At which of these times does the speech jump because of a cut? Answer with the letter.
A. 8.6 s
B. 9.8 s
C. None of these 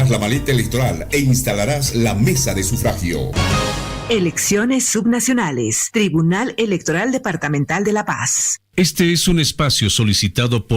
A